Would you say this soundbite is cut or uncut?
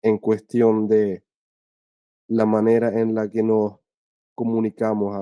uncut